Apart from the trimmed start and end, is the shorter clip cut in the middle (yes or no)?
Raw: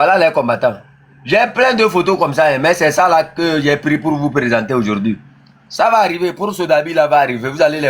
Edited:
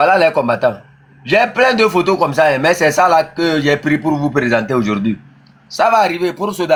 no